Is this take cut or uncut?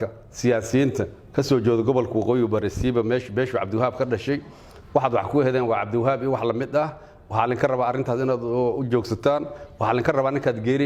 uncut